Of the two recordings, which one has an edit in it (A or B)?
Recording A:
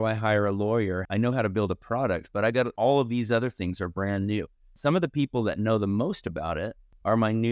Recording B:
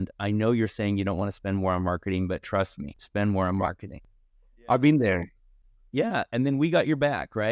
A